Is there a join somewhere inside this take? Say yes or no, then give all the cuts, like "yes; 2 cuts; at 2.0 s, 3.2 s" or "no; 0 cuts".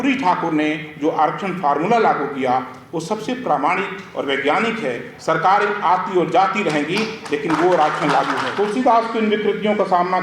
yes; 1 cut; at 8.4 s